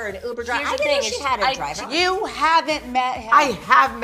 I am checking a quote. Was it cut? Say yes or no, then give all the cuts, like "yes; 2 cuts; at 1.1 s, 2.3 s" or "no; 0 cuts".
yes; 1 cut; at 1.8 s